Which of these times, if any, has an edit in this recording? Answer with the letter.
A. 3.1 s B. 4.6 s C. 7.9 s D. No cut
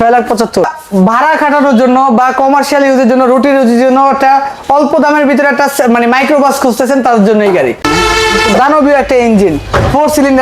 C